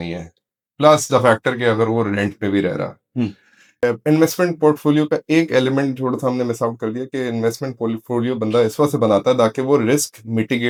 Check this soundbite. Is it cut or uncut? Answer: uncut